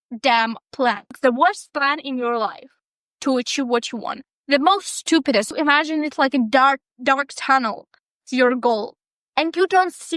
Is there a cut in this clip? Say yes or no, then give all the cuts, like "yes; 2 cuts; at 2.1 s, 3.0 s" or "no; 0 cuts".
yes; 2 cuts; at 1.0 s, 5.5 s